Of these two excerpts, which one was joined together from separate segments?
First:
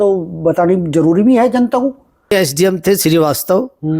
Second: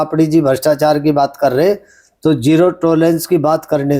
first; 1 cut; at 2.3 s

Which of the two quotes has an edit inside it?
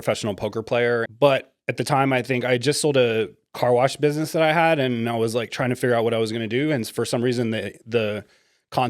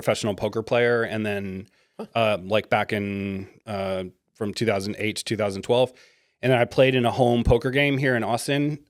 first; 1 cut; at 1.1 s

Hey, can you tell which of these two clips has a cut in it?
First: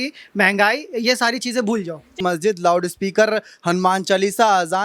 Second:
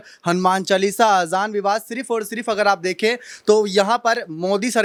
first; 1 cut; at 2.2 s

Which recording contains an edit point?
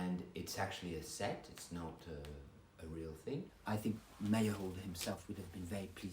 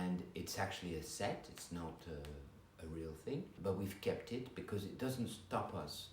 first; 1 cut; at 3.5 s

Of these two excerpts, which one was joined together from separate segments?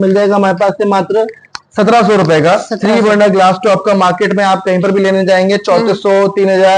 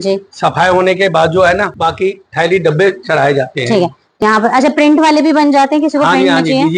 second; 2 cuts; at 1.7 s, 4.0 s

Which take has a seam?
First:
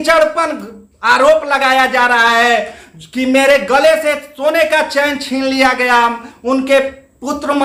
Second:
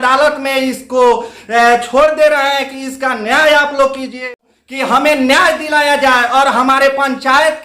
second; 1 cut; at 4.3 s

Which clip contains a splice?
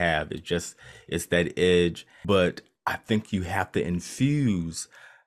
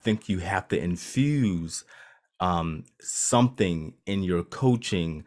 first; 1 cut; at 2.1 s

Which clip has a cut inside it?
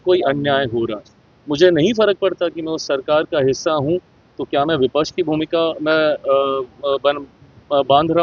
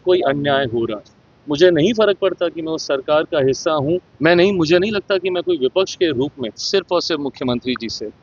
second; 2 cuts; at 4.1 s, 6.5 s

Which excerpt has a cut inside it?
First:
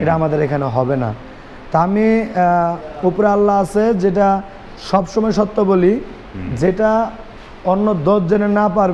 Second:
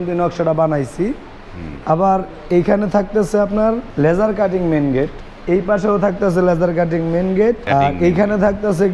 second; 3 cuts; at 3.9 s, 5.2 s, 7.6 s

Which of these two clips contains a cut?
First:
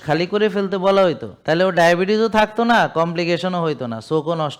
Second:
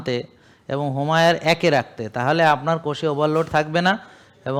first; 1 cut; at 1.3 s

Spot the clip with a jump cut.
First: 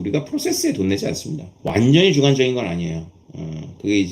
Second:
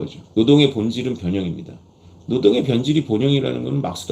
first; 1 cut; at 1.5 s

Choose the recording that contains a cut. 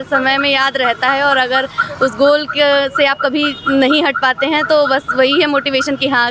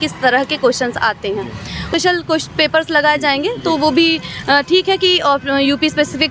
second; 1 cut; at 1.9 s

